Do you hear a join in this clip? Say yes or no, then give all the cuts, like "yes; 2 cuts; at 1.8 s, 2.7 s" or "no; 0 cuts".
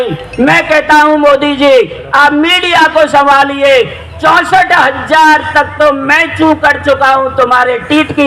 no; 0 cuts